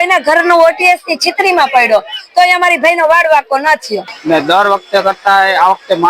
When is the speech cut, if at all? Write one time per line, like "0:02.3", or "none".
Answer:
0:04.0